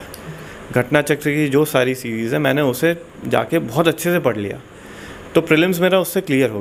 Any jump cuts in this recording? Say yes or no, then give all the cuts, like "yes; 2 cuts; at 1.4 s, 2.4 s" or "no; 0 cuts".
no; 0 cuts